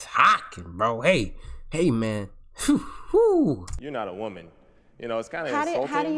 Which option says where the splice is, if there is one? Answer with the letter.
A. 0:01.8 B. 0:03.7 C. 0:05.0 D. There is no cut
B